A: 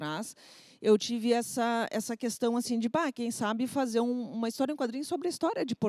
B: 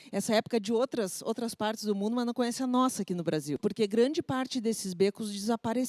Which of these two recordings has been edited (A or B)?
B